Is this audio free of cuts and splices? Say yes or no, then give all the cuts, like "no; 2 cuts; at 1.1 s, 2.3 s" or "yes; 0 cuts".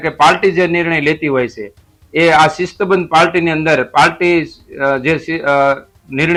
yes; 0 cuts